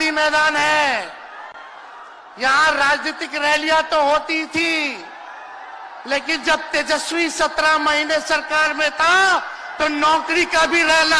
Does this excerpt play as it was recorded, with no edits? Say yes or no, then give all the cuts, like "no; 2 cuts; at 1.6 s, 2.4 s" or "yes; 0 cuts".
yes; 0 cuts